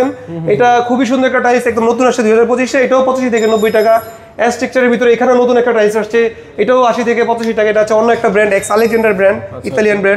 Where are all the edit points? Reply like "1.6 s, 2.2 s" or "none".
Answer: none

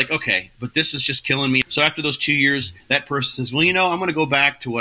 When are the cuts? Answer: 1.6 s

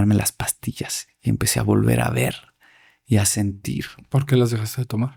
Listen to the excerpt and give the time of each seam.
none

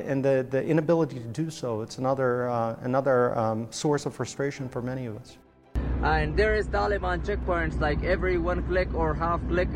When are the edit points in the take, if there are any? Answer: 5.8 s

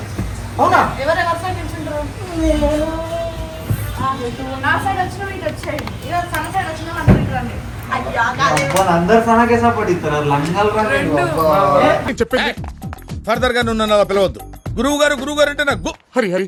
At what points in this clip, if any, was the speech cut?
none

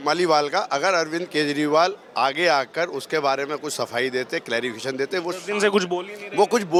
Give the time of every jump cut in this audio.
none

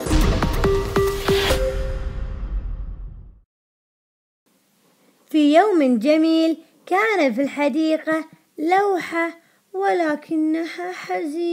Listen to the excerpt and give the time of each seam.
none

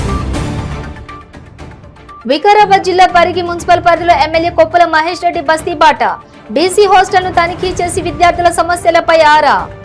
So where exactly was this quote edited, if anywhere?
none

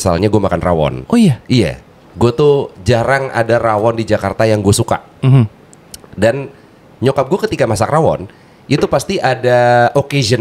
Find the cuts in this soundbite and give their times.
none

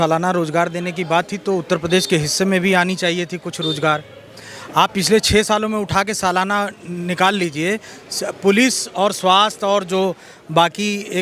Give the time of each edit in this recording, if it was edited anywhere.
none

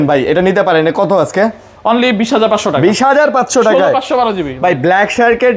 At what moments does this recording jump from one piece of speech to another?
none

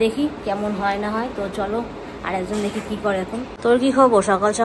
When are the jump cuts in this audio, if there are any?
3.5 s

